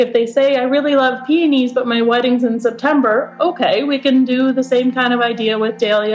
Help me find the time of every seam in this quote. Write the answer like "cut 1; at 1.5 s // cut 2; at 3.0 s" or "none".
none